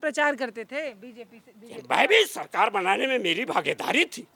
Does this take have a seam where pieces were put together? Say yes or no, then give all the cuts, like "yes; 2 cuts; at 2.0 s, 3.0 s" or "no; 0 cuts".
no; 0 cuts